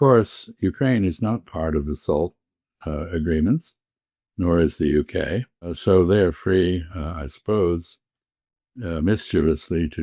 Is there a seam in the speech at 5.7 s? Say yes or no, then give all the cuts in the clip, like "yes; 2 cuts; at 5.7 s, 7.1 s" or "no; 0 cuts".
yes; 1 cut; at 5.7 s